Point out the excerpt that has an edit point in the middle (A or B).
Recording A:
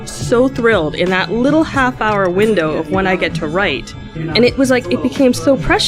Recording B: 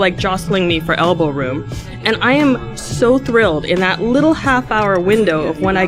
A